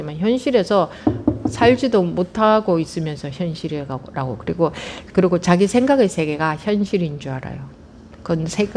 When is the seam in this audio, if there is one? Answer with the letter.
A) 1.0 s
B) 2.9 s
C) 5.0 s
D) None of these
D